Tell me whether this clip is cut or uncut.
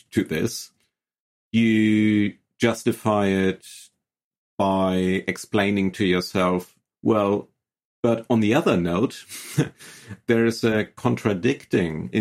cut